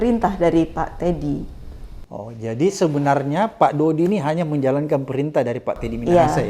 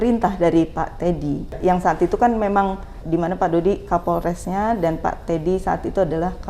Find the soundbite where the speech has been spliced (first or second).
second